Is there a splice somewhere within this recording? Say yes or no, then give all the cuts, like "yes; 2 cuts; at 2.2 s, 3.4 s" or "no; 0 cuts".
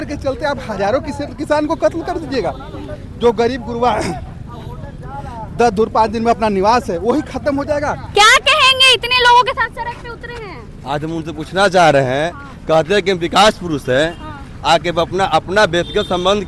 no; 0 cuts